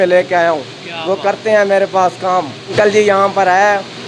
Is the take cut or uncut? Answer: cut